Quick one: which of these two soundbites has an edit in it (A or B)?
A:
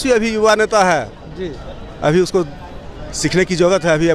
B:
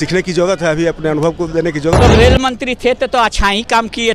B